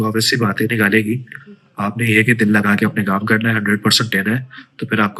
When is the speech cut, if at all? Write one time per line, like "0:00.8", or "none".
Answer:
none